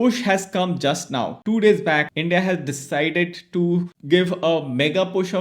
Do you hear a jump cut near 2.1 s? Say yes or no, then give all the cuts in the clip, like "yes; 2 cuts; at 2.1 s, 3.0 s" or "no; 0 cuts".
yes; 2 cuts; at 1.4 s, 2.1 s